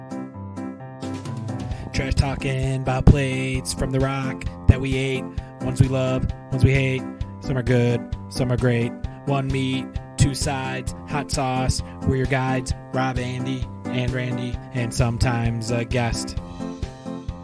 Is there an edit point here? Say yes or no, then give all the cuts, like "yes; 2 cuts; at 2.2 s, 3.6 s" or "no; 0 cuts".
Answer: yes; 1 cut; at 1.0 s